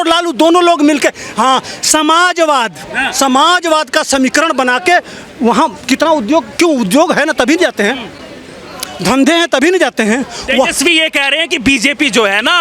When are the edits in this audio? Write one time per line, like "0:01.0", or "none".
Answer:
none